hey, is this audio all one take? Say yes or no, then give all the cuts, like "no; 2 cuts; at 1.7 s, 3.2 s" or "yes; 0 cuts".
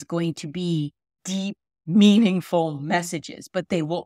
yes; 0 cuts